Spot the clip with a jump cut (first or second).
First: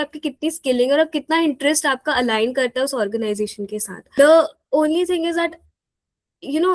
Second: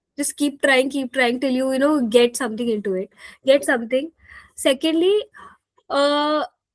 first